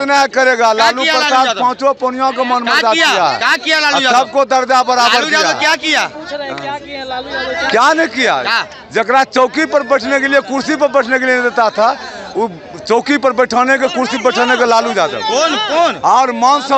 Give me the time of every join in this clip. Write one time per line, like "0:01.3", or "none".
none

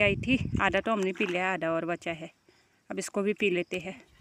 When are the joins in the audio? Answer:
none

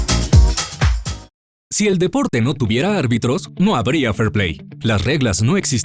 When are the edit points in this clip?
0:01.1

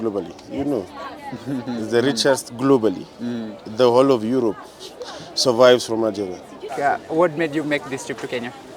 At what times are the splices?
0:06.7

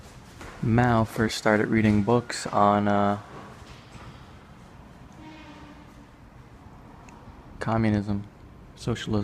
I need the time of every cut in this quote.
0:02.7

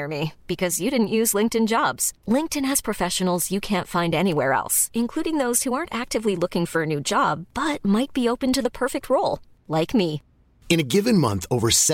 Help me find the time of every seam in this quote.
none

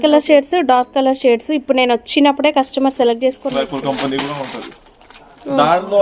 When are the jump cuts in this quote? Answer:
0:03.5

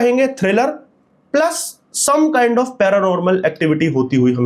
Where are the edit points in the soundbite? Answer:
none

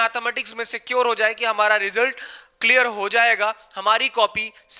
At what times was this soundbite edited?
none

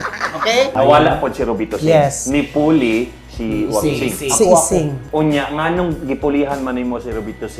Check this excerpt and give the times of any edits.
0:00.7
0:05.0

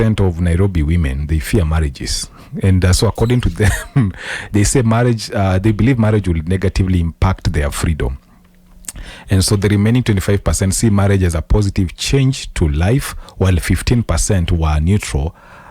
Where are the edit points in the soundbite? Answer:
none

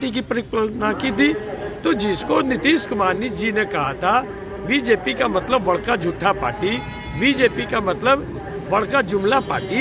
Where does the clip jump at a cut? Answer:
none

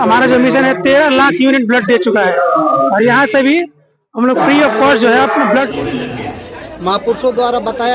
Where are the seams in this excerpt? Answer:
0:05.7

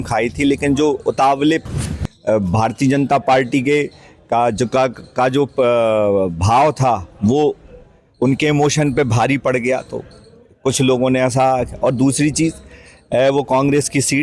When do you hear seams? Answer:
0:01.8

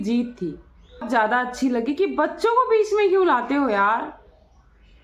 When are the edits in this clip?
0:01.0

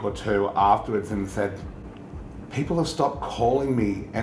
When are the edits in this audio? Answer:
none

